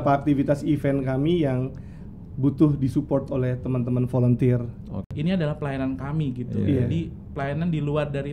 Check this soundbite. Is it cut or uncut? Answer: cut